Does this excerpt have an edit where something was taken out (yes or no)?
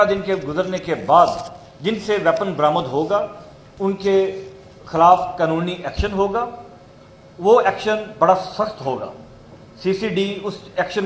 no